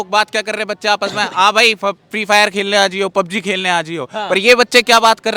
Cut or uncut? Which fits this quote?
uncut